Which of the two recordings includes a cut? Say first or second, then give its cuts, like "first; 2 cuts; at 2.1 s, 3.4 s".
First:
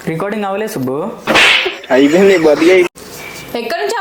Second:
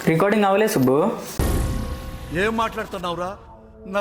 second; 1 cut; at 1.2 s